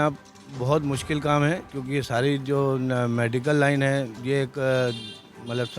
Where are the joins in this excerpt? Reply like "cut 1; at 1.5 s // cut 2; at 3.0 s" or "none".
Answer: cut 1; at 1.7 s // cut 2; at 4.1 s